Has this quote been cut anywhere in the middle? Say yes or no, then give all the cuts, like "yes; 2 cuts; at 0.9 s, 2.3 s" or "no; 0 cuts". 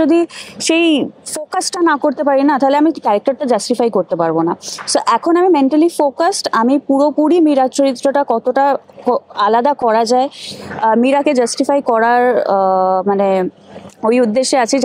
no; 0 cuts